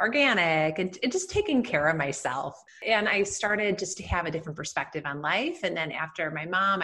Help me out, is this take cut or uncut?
cut